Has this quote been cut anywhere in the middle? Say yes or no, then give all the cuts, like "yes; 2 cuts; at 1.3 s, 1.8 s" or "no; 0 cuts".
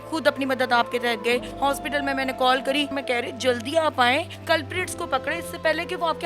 yes; 3 cuts; at 1.5 s, 3.0 s, 4.3 s